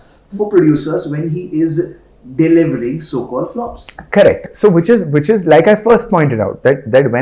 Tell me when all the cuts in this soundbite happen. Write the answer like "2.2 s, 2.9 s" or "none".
none